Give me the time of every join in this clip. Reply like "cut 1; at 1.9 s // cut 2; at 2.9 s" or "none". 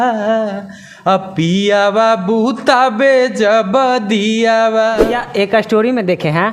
cut 1; at 5.1 s